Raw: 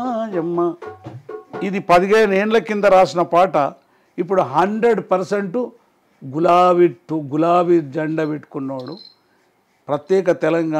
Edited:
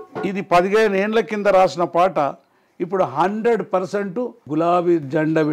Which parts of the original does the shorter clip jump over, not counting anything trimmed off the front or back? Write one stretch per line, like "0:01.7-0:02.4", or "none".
0:05.8-0:07.2